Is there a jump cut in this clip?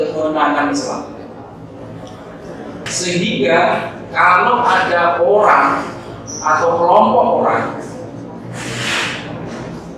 yes; 1 cut; at 2.9 s

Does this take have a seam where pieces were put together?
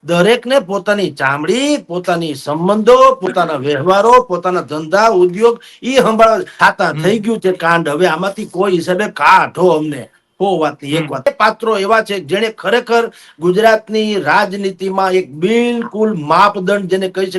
yes; 2 cuts; at 6.5 s, 11.3 s

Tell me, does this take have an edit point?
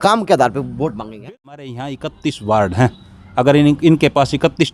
yes; 1 cut; at 1.1 s

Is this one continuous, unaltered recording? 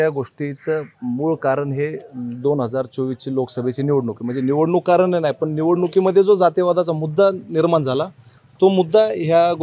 yes; 0 cuts

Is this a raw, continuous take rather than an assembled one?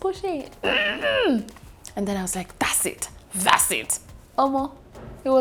yes; 0 cuts

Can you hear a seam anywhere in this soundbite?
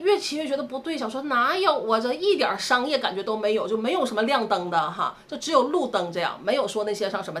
no; 0 cuts

